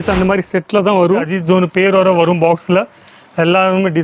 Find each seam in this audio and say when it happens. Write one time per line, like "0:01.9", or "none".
0:01.3